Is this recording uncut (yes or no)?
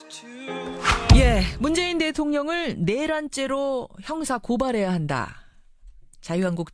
no